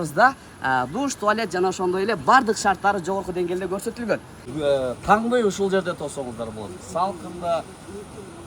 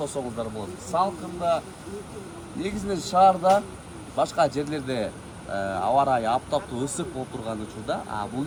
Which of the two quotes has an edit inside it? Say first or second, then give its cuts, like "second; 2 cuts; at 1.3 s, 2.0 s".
first; 1 cut; at 4.5 s